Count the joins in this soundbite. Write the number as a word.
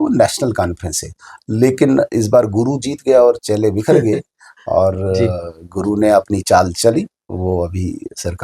zero